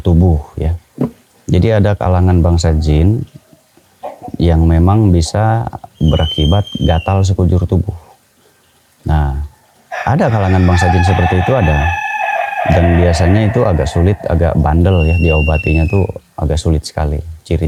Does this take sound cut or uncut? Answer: uncut